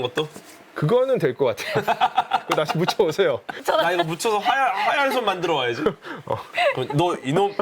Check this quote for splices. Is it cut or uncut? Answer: cut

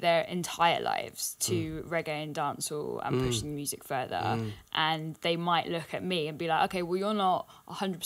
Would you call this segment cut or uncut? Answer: uncut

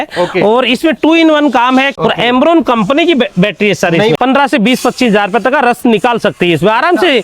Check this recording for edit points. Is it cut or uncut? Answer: cut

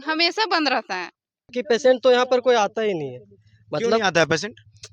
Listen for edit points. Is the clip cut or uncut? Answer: cut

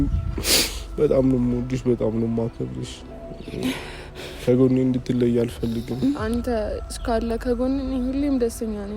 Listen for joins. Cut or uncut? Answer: cut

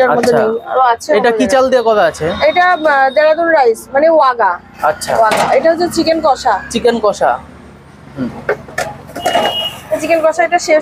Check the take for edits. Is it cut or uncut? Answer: uncut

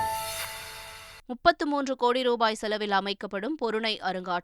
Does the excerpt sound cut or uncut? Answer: cut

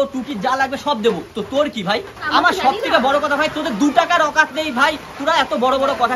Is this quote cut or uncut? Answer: cut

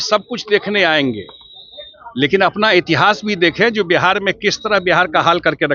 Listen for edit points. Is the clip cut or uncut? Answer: uncut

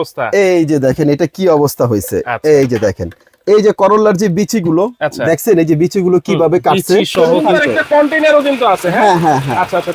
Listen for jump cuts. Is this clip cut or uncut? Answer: cut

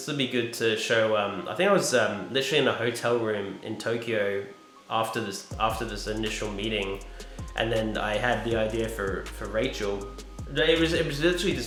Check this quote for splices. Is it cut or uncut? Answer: uncut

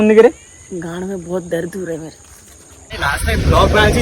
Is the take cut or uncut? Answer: cut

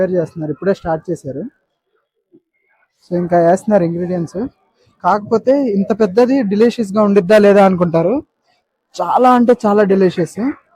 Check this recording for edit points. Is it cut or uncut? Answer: uncut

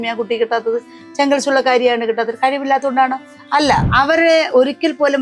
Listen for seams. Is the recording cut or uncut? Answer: cut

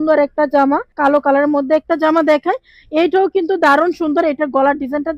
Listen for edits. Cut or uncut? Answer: cut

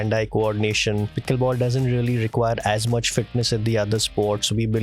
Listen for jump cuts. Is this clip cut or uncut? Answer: cut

